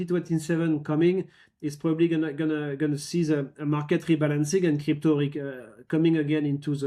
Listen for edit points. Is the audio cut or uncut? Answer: uncut